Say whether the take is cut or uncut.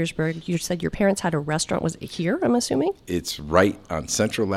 uncut